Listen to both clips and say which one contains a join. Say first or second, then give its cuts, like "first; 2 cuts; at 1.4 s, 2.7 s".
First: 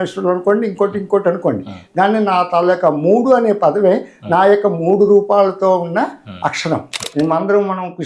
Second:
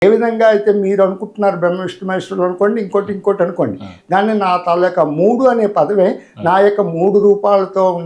first; 1 cut; at 7.1 s